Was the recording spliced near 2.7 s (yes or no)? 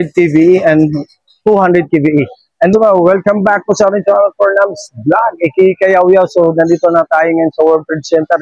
yes